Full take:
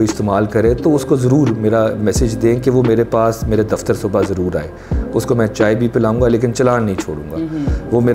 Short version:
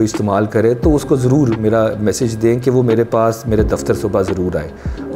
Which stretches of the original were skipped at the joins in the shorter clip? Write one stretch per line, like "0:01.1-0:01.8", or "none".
none